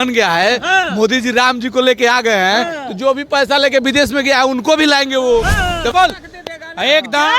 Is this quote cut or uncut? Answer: cut